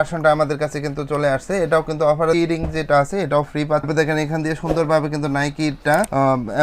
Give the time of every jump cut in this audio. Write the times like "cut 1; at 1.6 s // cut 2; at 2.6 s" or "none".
cut 1; at 2.3 s // cut 2; at 3.9 s